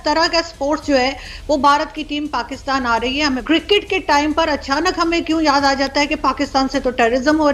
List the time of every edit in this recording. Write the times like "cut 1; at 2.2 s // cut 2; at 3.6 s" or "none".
cut 1; at 3.4 s